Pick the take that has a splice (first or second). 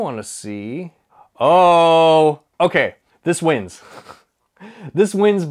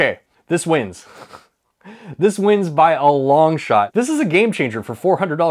second